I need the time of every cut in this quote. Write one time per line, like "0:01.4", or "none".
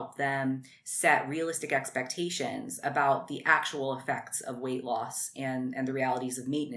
none